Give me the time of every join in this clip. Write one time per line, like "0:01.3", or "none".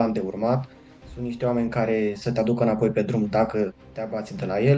none